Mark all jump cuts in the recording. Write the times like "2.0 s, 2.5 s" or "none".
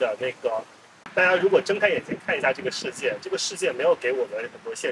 0.9 s